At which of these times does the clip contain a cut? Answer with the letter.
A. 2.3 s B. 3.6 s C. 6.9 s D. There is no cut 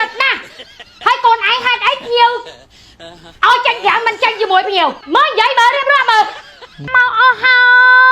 C